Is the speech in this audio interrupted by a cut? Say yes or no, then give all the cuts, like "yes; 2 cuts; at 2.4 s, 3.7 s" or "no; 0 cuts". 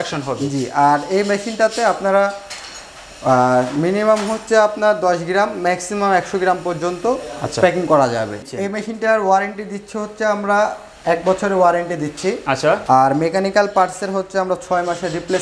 yes; 1 cut; at 8.4 s